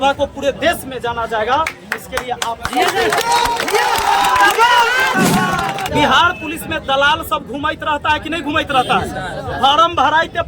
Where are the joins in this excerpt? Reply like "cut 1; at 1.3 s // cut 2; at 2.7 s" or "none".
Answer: cut 1; at 5.9 s